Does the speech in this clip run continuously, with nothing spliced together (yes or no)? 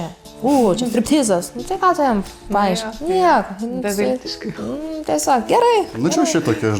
yes